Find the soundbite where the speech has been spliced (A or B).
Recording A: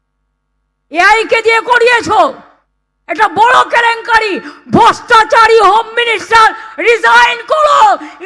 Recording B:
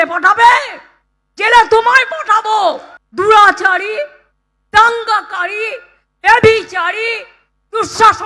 B